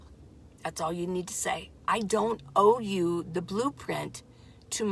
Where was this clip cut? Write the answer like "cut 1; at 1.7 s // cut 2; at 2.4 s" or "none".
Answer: cut 1; at 1.8 s